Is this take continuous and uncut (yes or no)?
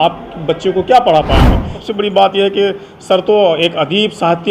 no